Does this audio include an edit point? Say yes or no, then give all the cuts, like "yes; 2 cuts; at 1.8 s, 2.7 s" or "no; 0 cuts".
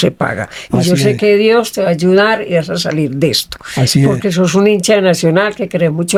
no; 0 cuts